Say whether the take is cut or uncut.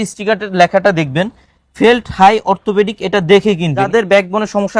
cut